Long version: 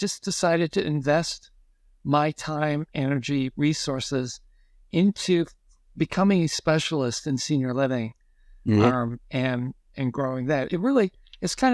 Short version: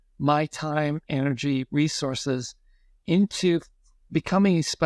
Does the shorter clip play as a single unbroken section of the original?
yes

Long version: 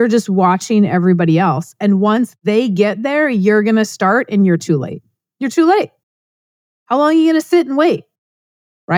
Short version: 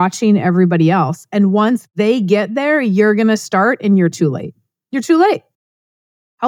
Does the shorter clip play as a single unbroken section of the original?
yes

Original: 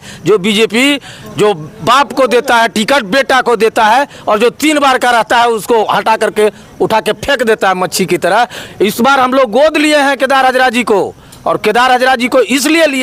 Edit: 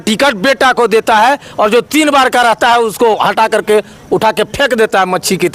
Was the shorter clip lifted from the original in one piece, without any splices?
yes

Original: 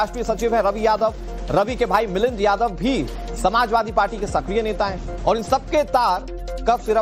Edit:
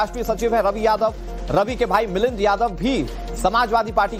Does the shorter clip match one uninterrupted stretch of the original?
yes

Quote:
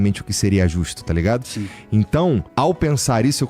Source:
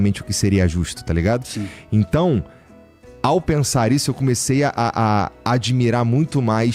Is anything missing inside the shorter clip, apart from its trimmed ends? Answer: yes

